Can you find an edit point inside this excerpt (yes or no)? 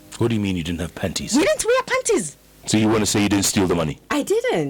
yes